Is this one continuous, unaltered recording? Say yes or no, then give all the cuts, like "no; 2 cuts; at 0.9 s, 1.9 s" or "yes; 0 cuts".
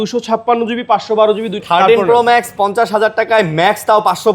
no; 1 cut; at 1.6 s